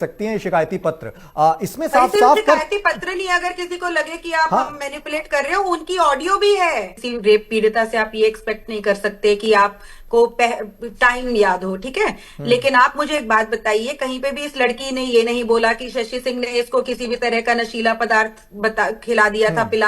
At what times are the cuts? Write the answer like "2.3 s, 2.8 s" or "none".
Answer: 7.0 s